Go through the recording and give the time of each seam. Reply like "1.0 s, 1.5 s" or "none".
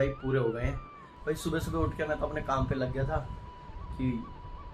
1.2 s